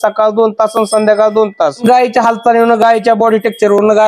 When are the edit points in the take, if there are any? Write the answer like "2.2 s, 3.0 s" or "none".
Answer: 1.7 s